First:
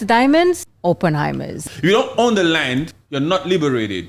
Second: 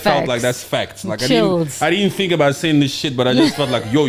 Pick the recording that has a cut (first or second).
first